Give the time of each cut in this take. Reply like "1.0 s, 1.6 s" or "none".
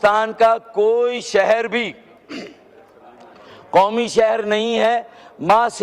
none